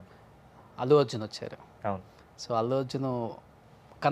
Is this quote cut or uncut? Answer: uncut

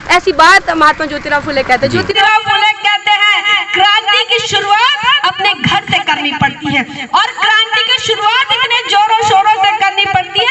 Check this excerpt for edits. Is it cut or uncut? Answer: cut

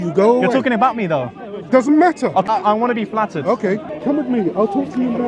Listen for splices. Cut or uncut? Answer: cut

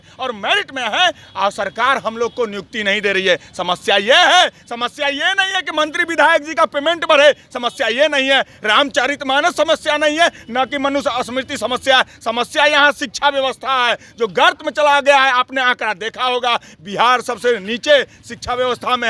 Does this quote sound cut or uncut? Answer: uncut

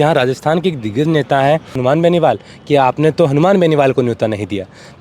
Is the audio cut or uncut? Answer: cut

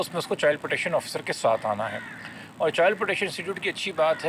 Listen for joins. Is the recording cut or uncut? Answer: uncut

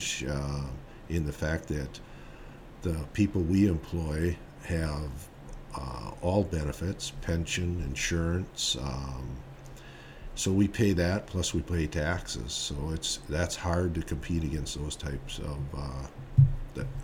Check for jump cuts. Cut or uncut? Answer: uncut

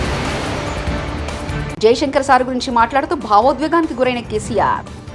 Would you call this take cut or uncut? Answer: uncut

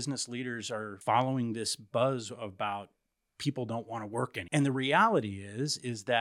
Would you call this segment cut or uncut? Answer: cut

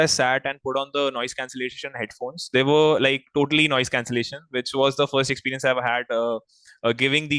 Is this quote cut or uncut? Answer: uncut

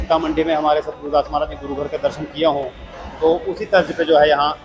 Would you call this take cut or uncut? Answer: uncut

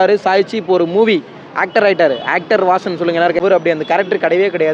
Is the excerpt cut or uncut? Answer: cut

